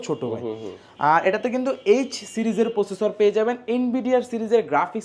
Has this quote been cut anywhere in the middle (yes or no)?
no